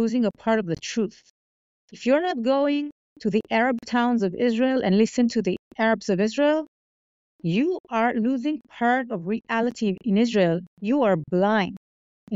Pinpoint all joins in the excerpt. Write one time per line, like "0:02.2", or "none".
none